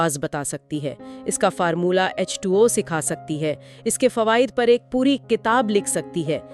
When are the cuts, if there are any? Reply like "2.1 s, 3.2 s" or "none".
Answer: none